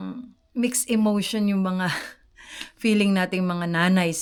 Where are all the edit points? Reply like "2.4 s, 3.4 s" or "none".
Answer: none